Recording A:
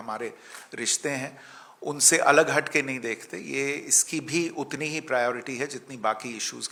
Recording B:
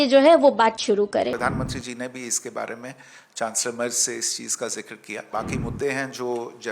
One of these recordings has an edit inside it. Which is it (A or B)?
B